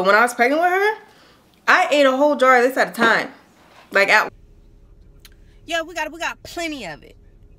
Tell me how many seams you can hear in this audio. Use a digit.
1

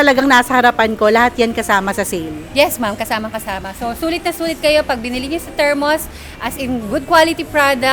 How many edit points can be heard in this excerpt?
0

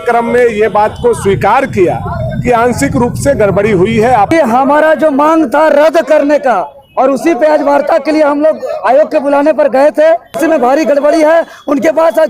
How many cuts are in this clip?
2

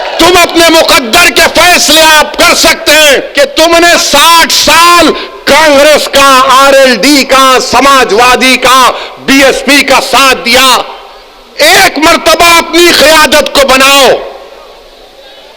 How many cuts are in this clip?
1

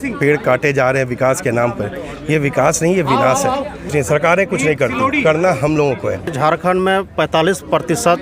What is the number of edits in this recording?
2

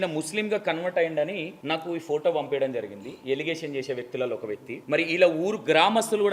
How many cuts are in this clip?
2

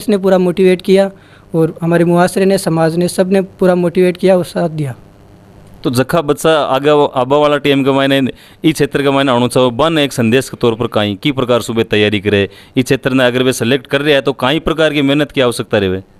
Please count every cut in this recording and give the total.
0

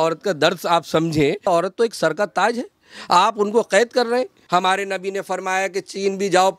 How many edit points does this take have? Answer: 2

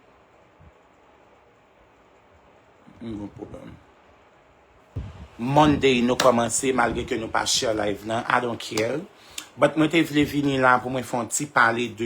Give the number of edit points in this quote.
1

